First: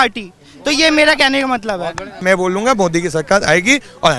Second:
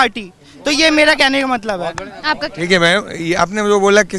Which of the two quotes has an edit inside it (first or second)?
first